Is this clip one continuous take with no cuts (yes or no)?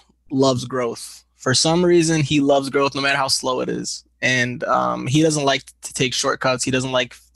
yes